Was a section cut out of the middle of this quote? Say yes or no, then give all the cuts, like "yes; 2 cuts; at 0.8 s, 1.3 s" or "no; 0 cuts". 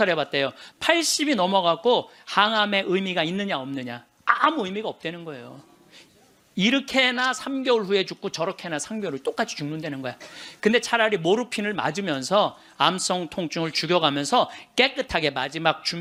no; 0 cuts